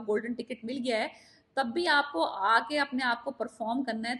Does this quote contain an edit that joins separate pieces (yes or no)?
no